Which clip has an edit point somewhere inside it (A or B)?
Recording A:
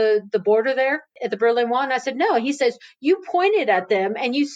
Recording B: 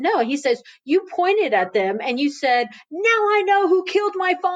A